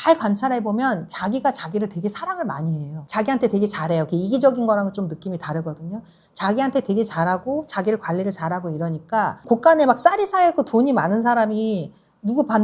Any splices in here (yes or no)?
no